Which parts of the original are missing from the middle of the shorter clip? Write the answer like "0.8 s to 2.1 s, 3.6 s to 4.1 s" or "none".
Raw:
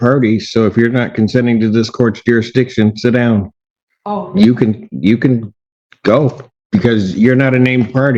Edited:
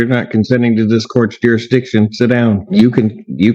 3.5 s to 4.3 s